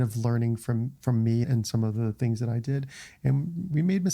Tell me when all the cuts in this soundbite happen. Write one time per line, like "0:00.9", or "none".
0:01.5